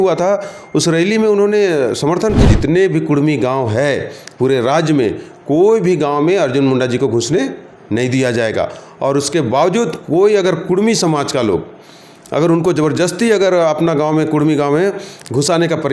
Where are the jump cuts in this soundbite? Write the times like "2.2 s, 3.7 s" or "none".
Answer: 2.4 s